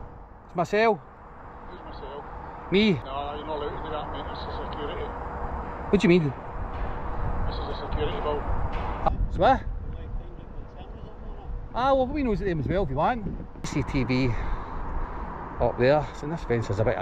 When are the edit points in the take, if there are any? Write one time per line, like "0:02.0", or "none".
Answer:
0:03.0
0:09.1
0:13.7